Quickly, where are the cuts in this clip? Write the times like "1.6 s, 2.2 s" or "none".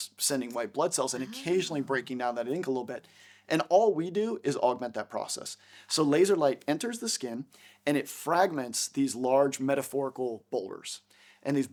none